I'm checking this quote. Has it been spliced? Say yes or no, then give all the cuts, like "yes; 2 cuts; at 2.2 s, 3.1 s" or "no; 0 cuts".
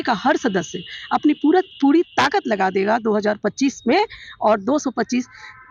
no; 0 cuts